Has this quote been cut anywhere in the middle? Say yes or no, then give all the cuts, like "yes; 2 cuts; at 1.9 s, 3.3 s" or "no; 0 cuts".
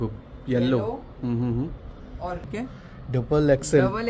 yes; 1 cut; at 2.4 s